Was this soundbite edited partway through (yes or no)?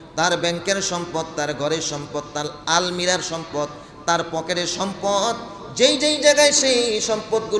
no